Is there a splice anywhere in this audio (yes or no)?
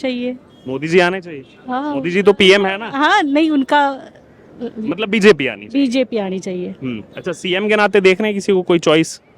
no